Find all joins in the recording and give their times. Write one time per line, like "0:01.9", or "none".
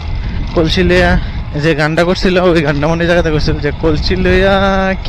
0:01.1